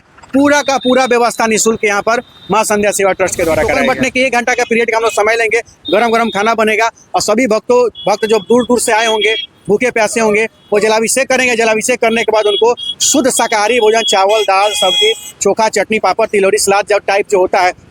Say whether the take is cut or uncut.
cut